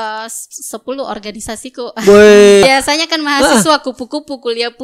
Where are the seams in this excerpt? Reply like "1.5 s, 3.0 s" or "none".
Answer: 2.6 s